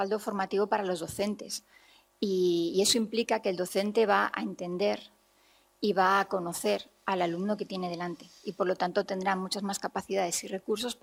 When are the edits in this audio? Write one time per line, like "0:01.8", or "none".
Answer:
none